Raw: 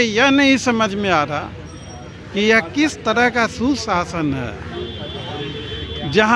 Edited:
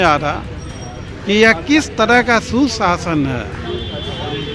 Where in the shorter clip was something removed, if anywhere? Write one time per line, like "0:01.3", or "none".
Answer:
none